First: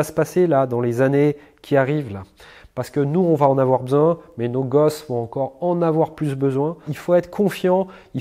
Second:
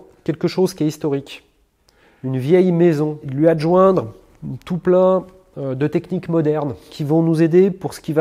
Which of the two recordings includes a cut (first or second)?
second